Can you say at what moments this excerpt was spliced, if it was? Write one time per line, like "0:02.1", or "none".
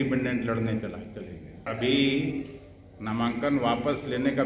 0:01.7